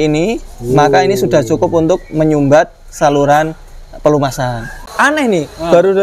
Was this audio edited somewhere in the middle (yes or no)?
yes